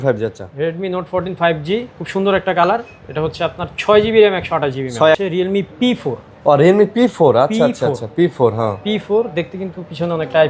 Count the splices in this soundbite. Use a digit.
1